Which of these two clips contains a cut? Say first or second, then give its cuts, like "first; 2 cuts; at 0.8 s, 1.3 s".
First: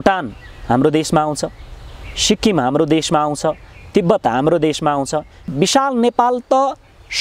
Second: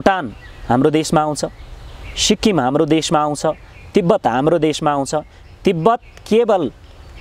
first; 1 cut; at 5.5 s